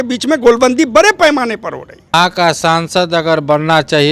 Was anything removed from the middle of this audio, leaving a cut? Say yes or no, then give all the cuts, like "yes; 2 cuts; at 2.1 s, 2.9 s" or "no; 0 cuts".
yes; 1 cut; at 2.1 s